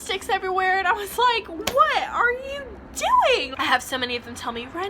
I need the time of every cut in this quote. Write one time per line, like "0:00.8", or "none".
0:03.5

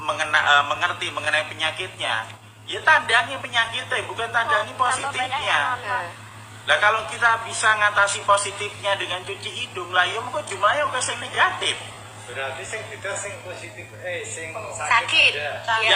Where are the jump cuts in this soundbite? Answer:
none

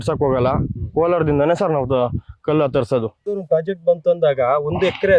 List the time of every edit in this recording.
0:03.3

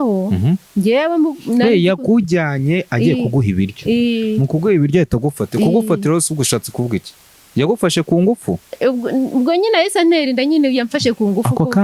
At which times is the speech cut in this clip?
none

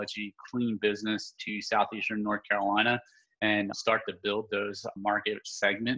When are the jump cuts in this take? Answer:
0:03.8
0:05.0

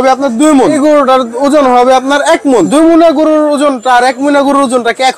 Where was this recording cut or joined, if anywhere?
0:00.8
0:02.7

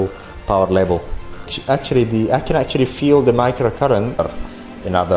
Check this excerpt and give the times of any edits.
0:04.2

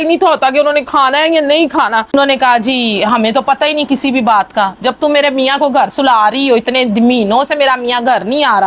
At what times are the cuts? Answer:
0:02.1

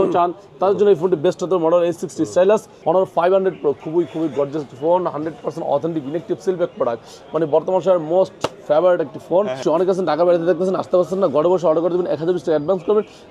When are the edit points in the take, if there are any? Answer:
0:02.7
0:09.6

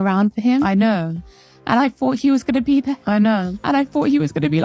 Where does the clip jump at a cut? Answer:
none

